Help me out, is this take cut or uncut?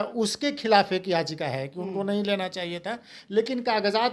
uncut